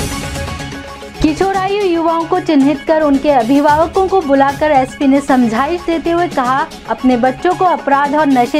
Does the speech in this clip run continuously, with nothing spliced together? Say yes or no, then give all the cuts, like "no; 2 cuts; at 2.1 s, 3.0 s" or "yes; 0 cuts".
no; 1 cut; at 1.1 s